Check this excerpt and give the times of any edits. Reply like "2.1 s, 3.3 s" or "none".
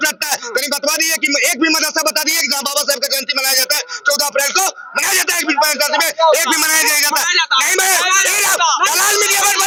none